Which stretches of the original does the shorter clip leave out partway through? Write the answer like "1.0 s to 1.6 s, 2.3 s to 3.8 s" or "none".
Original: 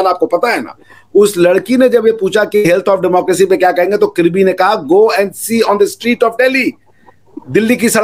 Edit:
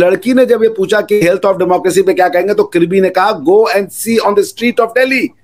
none